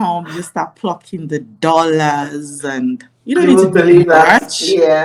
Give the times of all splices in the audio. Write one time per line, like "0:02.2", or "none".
none